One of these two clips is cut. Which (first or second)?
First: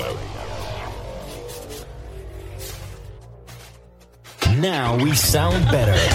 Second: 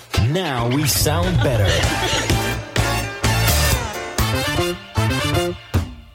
first